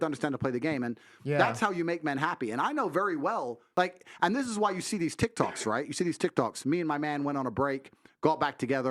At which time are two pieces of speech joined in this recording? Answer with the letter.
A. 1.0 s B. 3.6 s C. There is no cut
B